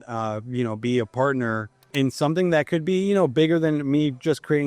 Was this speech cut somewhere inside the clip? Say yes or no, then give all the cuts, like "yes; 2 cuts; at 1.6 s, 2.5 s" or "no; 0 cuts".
yes; 1 cut; at 1.8 s